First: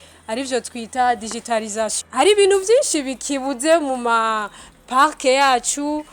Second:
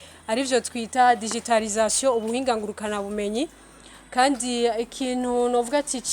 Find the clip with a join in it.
first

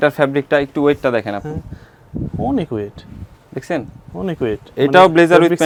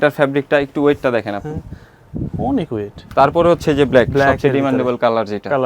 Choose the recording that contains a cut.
second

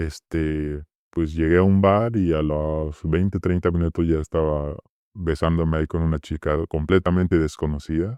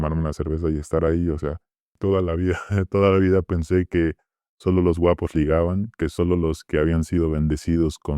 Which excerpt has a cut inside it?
second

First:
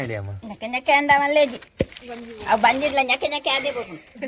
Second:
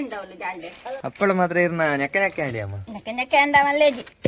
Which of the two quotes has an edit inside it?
second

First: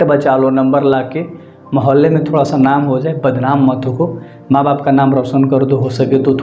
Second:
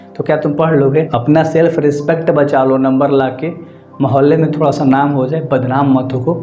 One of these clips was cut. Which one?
second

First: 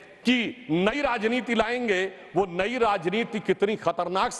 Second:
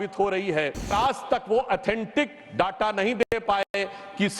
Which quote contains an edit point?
second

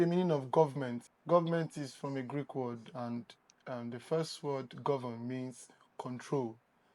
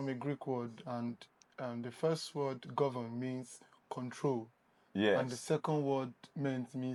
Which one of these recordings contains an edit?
first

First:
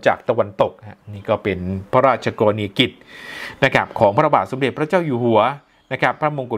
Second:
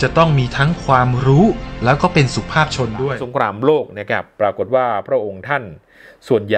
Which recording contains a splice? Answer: second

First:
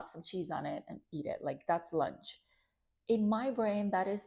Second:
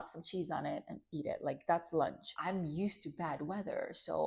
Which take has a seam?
second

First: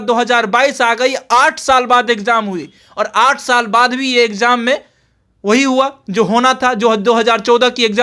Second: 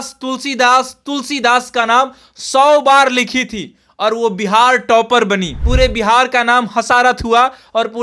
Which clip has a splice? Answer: second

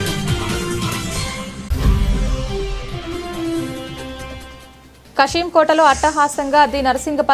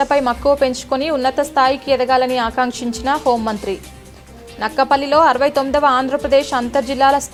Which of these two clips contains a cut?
first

